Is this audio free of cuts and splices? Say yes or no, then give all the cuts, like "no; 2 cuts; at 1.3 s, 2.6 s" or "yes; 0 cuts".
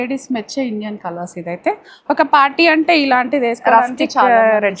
yes; 0 cuts